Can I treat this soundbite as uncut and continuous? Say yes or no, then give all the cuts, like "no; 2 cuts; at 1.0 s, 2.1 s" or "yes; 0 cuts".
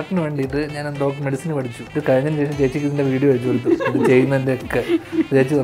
no; 1 cut; at 1.8 s